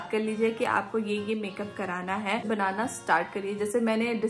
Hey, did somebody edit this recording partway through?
yes; 1 cut; at 2.5 s

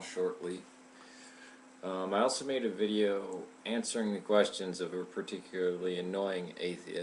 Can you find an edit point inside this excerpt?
yes; 1 cut; at 2.8 s

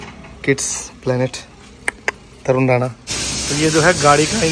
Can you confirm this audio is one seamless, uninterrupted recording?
no; 1 cut; at 3.0 s

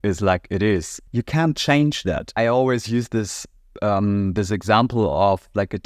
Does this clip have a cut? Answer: yes; 2 cuts; at 1.0 s, 2.3 s

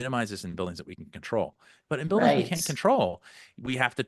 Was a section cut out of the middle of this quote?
no; 0 cuts

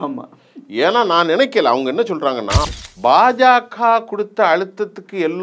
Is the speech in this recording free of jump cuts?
no; 1 cut; at 2.7 s

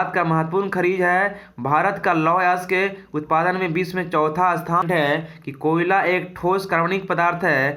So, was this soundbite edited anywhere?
yes; 1 cut; at 4.8 s

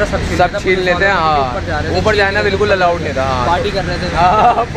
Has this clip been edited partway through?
no; 0 cuts

